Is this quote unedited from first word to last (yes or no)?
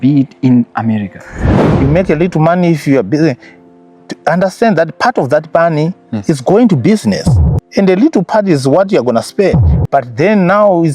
no